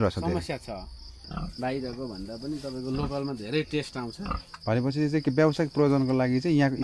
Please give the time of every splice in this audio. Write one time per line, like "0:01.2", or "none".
0:01.1